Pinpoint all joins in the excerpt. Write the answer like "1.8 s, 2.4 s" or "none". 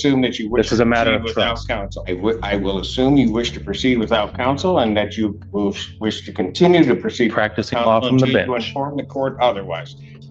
none